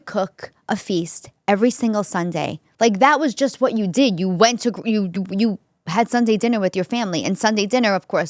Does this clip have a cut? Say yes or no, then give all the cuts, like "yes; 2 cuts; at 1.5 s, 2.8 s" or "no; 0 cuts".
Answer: yes; 1 cut; at 2.6 s